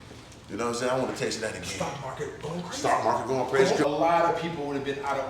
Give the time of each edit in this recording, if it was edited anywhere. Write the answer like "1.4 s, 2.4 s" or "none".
3.8 s